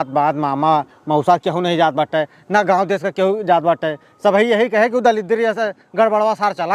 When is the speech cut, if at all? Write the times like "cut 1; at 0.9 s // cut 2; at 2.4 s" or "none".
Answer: none